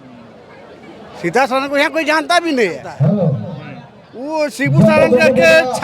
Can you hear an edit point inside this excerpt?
yes; 1 cut; at 2.9 s

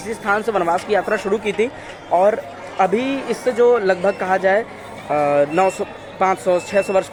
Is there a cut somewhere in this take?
no; 0 cuts

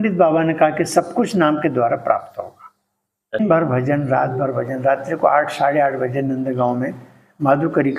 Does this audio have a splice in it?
yes; 1 cut; at 3.4 s

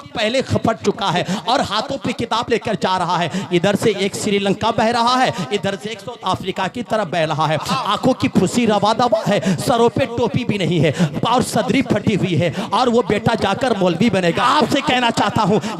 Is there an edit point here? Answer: yes; 1 cut; at 14.4 s

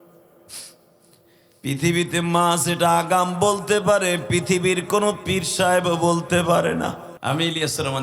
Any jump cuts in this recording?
yes; 1 cut; at 7.1 s

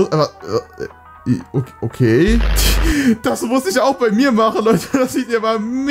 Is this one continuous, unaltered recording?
no; 1 cut; at 2.6 s

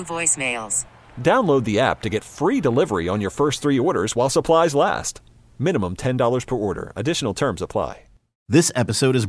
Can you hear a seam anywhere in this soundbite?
yes; 1 cut; at 8.3 s

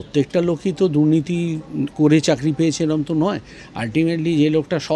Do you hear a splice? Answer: no; 0 cuts

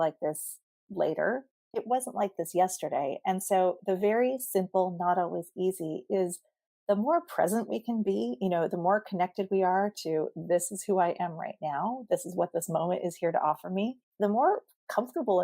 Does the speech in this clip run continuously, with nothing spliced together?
no; 1 cut; at 14.0 s

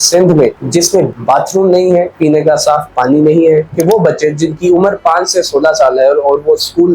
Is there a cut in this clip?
yes; 2 cuts; at 1.1 s, 3.7 s

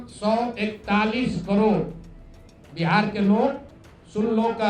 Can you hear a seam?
no; 0 cuts

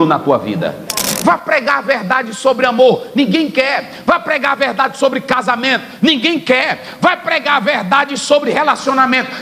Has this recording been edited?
yes; 1 cut; at 1.0 s

